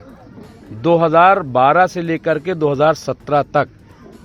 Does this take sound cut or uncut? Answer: uncut